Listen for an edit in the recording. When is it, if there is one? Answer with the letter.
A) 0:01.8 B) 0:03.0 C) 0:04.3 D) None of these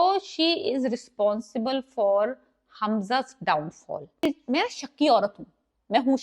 C